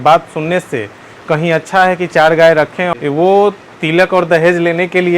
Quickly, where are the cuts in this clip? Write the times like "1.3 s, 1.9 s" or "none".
2.9 s